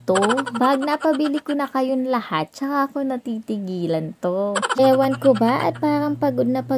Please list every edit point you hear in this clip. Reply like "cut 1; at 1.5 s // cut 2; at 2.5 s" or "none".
cut 1; at 4.8 s